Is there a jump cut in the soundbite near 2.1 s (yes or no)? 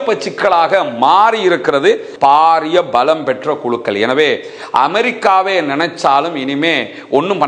yes